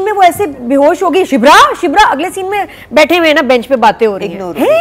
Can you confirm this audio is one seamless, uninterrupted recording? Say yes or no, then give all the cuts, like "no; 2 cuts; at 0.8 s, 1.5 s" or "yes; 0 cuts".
yes; 0 cuts